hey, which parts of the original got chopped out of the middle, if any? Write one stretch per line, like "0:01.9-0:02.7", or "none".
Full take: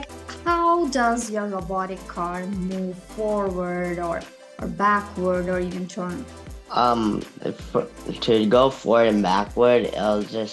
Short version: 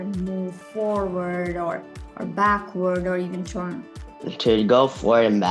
0:06.6-0:08.0